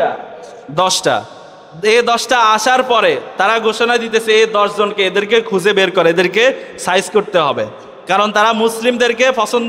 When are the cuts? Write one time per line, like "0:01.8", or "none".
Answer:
none